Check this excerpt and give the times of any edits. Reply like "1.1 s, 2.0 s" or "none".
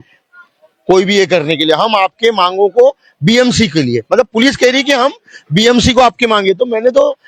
none